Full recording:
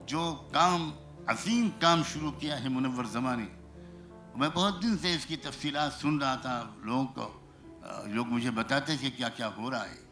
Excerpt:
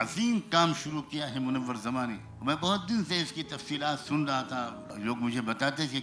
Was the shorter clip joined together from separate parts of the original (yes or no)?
yes